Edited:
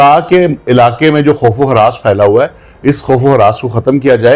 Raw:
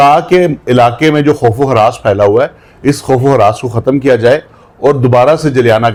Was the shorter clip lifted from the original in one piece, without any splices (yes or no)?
yes